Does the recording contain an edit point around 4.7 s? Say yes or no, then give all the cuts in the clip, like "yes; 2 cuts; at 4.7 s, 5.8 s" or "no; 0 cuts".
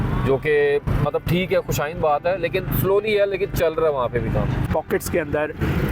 yes; 1 cut; at 4.7 s